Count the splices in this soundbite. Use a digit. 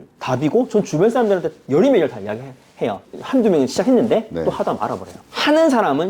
2